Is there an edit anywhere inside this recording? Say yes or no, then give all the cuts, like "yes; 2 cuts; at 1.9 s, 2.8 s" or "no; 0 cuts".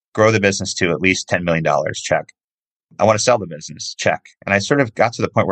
no; 0 cuts